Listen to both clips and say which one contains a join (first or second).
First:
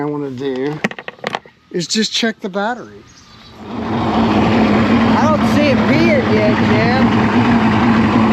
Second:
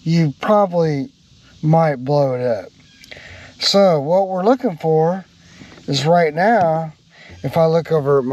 first